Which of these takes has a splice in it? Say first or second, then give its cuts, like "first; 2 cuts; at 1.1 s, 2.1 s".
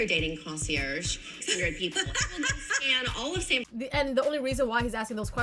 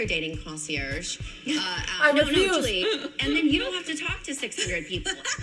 first; 2 cuts; at 1.3 s, 3.6 s